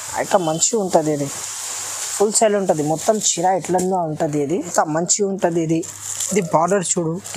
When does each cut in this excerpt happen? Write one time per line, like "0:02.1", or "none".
0:04.7